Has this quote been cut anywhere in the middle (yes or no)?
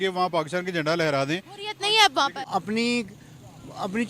yes